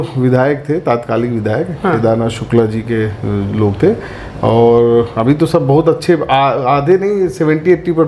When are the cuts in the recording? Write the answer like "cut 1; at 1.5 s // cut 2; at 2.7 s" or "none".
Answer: none